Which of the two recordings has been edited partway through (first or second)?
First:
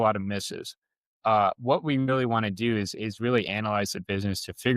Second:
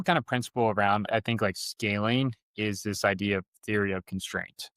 second